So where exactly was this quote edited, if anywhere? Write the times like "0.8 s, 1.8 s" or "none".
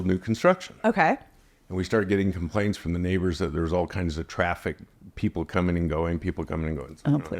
none